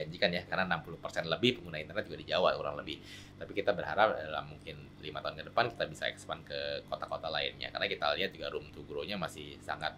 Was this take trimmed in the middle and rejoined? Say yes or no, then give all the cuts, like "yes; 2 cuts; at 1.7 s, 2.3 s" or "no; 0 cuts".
no; 0 cuts